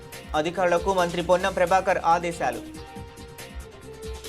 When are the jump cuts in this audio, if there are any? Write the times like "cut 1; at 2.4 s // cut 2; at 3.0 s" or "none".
cut 1; at 2.6 s

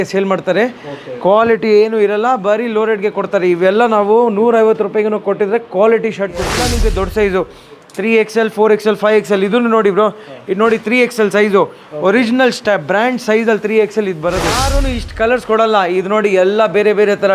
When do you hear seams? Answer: cut 1; at 6.5 s // cut 2; at 14.6 s

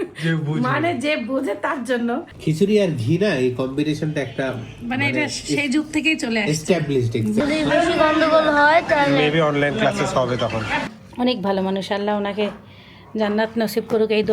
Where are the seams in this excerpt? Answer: cut 1; at 2.3 s // cut 2; at 7.4 s // cut 3; at 10.8 s

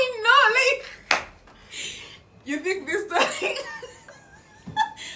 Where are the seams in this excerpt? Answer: none

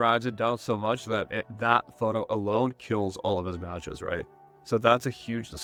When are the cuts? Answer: none

